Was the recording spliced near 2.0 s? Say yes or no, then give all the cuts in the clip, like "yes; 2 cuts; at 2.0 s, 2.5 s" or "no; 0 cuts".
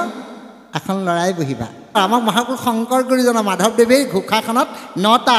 yes; 1 cut; at 2.0 s